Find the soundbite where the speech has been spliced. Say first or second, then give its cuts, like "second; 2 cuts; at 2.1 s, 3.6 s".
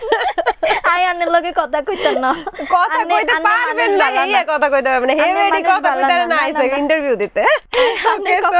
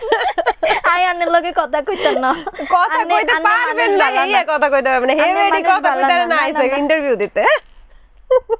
first; 1 cut; at 7.7 s